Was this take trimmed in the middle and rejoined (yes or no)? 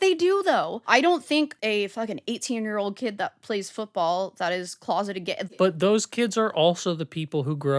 yes